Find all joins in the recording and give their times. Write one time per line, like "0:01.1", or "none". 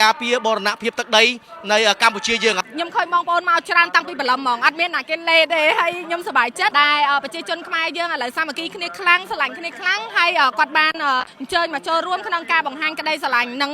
0:02.6